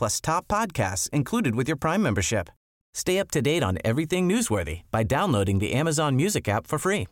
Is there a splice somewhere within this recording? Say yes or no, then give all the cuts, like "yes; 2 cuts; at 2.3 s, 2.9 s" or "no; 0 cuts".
no; 0 cuts